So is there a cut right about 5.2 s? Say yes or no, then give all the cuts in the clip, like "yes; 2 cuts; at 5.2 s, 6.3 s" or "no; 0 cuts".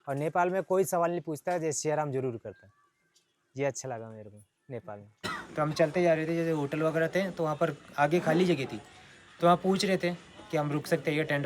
yes; 1 cut; at 5.2 s